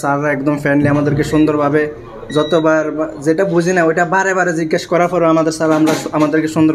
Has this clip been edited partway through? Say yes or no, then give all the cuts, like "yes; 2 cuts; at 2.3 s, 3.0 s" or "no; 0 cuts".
no; 0 cuts